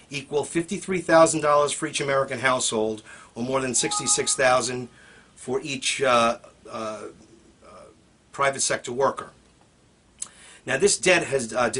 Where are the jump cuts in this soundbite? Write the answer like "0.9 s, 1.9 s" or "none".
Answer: none

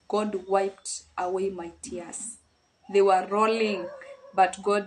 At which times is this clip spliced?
none

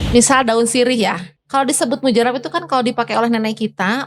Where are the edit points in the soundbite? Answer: 1.3 s

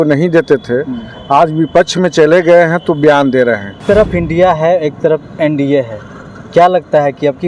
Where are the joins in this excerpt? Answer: 3.8 s

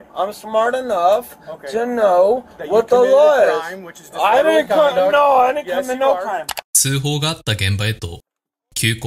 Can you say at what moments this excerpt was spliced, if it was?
none

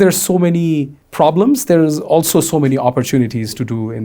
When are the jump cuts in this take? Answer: 1.0 s

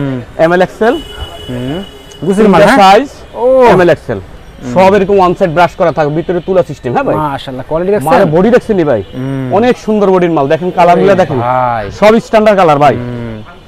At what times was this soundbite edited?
none

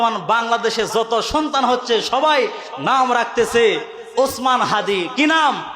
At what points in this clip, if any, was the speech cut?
none

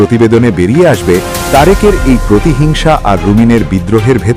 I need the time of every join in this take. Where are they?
none

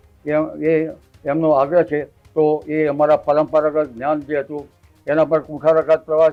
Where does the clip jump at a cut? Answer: none

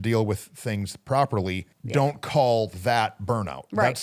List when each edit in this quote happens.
1.7 s

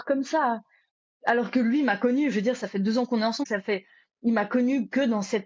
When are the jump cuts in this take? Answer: 3.4 s

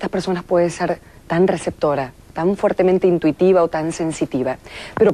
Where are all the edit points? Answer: 1.7 s

